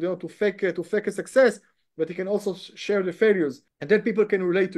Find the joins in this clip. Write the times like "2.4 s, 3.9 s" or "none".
3.7 s